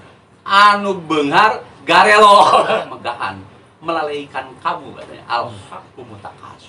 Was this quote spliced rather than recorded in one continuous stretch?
yes; 1 cut; at 2.7 s

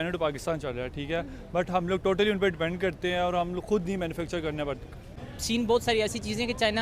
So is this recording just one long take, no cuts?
no; 1 cut; at 5.2 s

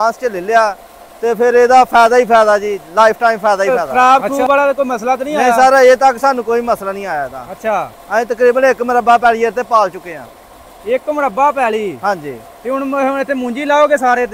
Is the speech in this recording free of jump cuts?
no; 1 cut; at 3.7 s

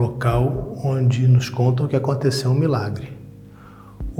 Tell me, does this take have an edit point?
no; 0 cuts

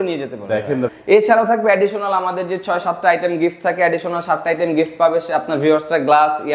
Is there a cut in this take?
yes; 1 cut; at 0.9 s

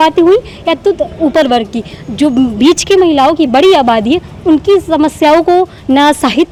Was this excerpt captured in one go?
yes; 0 cuts

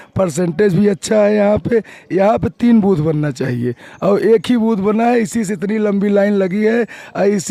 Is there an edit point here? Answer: no; 0 cuts

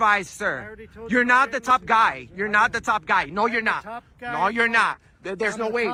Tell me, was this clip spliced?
no; 0 cuts

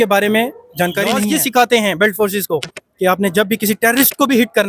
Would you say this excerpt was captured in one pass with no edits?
no; 1 cut; at 1.3 s

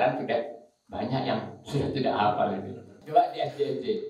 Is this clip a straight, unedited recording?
no; 1 cut; at 3.0 s

